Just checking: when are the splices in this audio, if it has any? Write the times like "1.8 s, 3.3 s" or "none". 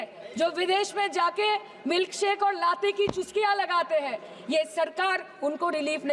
none